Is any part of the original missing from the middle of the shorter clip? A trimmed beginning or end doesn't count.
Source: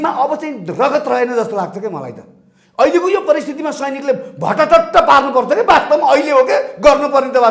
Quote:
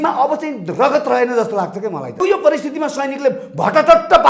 yes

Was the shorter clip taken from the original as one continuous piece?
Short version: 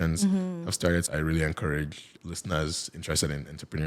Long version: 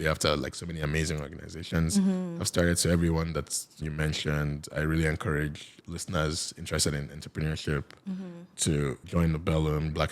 no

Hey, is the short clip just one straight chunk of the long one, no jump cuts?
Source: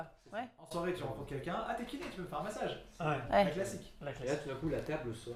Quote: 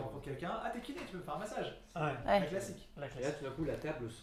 yes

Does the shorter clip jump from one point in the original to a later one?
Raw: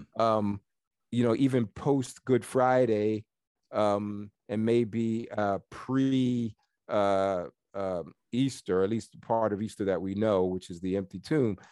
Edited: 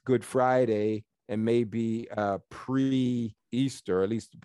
yes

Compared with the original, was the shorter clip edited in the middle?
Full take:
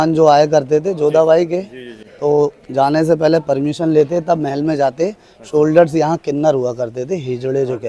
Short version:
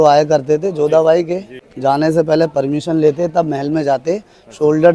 yes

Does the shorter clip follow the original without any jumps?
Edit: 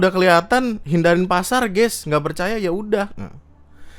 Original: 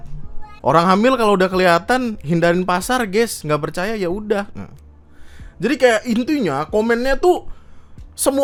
yes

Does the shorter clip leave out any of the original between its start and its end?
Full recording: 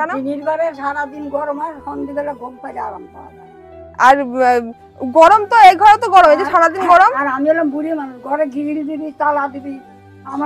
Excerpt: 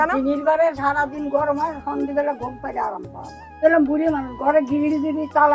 yes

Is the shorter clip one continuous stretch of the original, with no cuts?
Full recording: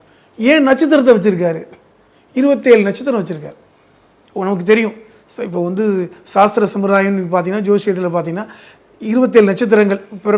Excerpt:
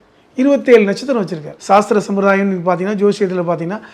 no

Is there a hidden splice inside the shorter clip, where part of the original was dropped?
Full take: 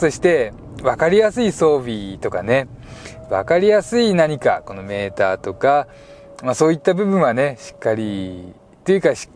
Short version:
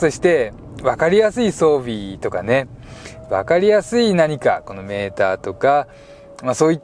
no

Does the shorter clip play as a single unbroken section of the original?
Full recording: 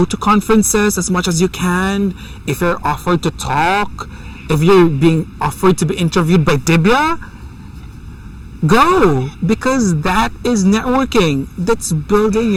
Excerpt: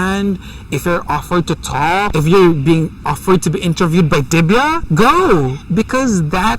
no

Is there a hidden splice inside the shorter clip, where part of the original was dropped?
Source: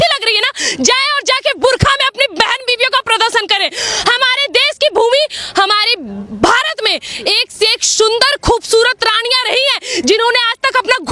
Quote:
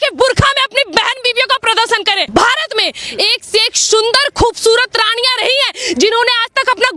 yes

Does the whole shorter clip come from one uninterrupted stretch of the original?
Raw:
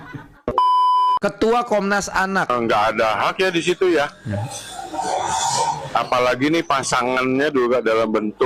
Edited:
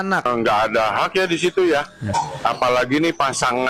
no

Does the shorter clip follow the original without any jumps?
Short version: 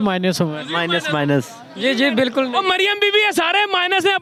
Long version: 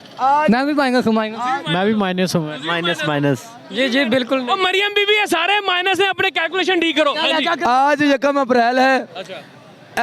yes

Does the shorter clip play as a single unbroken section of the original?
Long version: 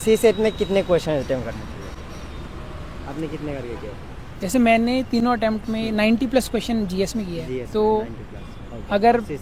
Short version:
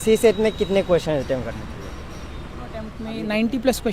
no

